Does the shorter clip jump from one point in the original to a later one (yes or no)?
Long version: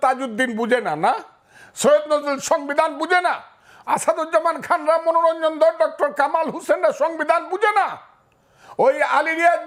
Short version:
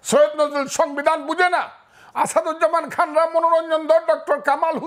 no